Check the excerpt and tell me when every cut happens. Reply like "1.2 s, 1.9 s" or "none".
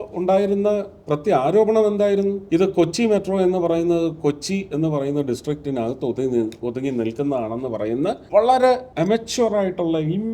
2.4 s, 8.2 s, 8.9 s